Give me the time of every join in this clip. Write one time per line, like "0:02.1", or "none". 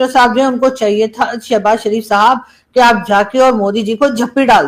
none